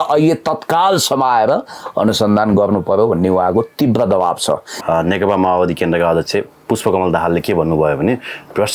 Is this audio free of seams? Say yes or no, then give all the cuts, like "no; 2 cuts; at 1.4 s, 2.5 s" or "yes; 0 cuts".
no; 1 cut; at 4.7 s